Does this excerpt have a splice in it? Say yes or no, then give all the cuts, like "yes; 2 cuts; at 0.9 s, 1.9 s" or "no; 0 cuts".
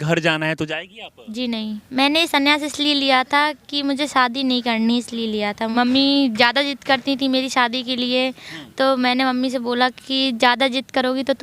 yes; 2 cuts; at 1.8 s, 5.7 s